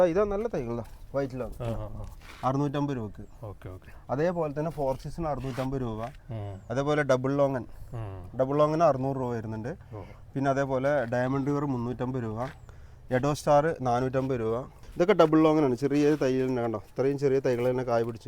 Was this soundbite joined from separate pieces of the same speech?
yes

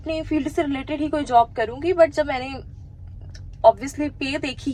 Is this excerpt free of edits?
yes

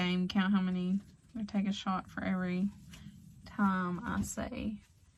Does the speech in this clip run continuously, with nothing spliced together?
yes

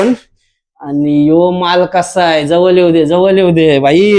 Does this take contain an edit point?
no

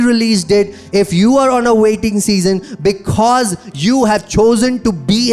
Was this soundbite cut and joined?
no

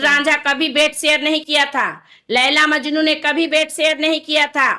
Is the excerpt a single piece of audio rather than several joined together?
yes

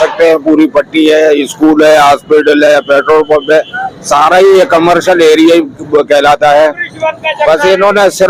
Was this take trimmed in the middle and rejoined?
no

